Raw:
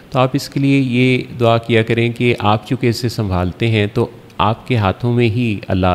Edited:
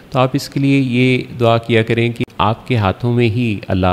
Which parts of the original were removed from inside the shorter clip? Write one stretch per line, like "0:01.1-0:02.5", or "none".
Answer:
0:02.2-0:04.2